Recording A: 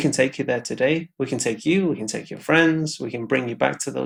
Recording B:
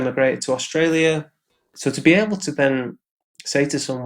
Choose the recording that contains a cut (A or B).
B